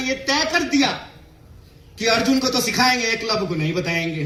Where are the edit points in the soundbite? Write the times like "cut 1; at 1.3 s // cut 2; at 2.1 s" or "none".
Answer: none